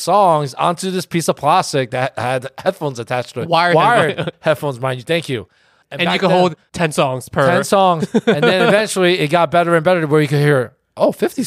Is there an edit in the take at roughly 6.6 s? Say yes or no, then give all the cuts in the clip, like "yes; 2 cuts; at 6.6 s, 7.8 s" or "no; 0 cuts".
no; 0 cuts